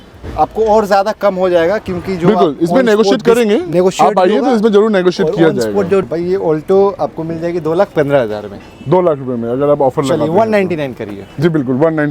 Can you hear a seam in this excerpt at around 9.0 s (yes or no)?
no